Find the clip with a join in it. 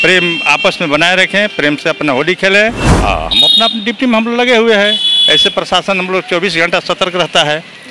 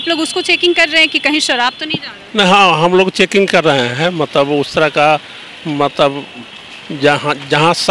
first; 1 cut; at 2.9 s

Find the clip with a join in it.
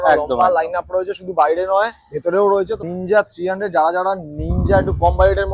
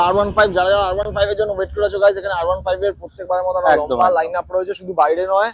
first; 1 cut; at 2.9 s

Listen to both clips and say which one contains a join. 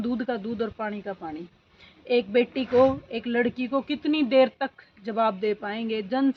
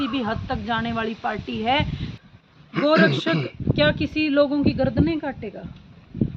second; 1 cut; at 2.1 s

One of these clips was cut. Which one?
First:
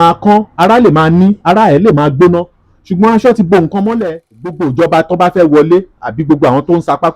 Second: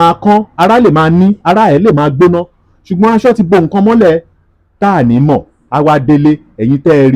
first; 1 cut; at 4.5 s

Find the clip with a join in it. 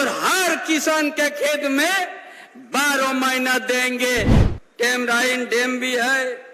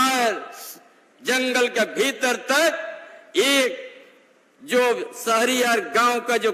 first; 1 cut; at 4.4 s

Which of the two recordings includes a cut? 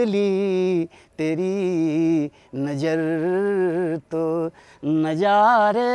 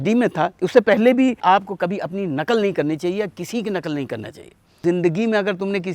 second; 2 cuts; at 1.4 s, 4.8 s

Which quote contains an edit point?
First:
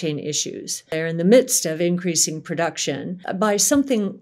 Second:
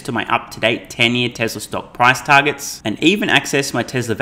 first; 2 cuts; at 0.9 s, 3.2 s

